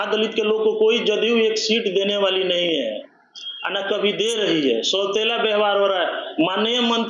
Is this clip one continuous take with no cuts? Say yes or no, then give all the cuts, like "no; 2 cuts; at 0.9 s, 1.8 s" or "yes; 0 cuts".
yes; 0 cuts